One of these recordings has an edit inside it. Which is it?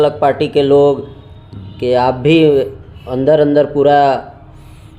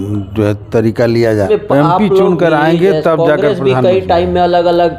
second; 1 cut; at 1.5 s

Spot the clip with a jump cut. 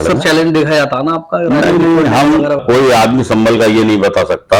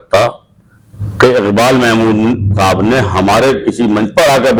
first; 1 cut; at 2.6 s

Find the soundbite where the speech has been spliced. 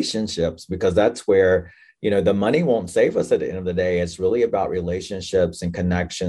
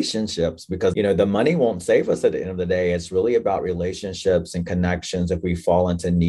second; 1 cut; at 0.9 s

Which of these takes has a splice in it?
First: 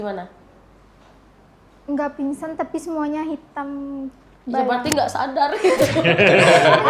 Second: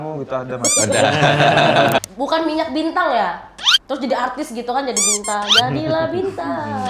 second; 1 cut; at 2.0 s

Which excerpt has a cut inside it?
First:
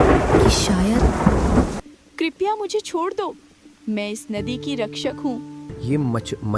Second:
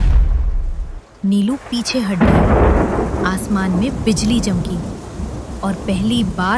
first; 2 cuts; at 1.8 s, 5.7 s

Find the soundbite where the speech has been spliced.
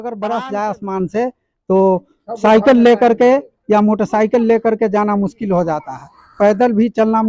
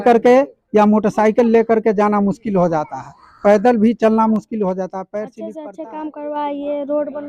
second; 1 cut; at 5.6 s

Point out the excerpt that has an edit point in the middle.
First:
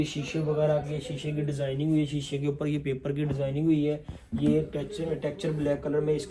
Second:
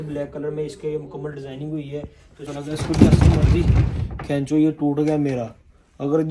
second; 1 cut; at 2.4 s

